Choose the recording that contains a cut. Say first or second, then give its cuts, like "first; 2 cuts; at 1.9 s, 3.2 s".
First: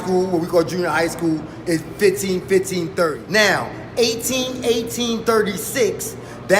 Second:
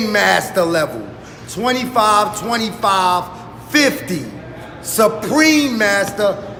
first; 1 cut; at 3.2 s